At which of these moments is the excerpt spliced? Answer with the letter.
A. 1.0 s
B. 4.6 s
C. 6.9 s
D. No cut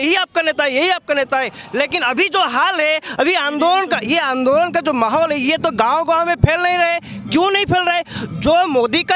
D